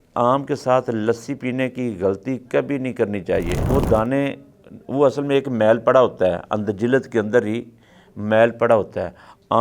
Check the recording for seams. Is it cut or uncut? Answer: cut